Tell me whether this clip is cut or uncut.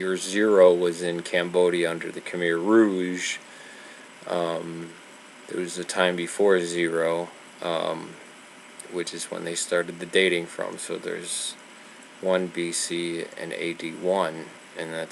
uncut